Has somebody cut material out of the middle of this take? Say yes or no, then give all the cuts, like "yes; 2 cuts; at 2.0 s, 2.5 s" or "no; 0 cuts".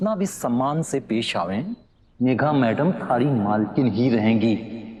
no; 0 cuts